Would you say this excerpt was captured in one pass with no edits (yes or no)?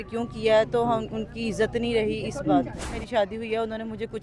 no